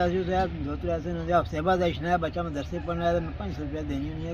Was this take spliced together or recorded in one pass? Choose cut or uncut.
uncut